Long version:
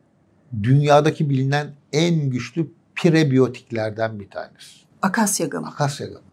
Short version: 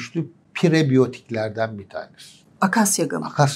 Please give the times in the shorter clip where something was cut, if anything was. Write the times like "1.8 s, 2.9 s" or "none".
none